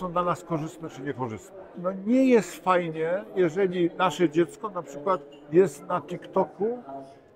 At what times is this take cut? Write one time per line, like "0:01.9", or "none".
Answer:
0:01.8